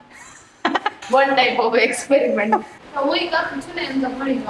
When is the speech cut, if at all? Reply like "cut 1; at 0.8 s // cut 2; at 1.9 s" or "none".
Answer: cut 1; at 2.7 s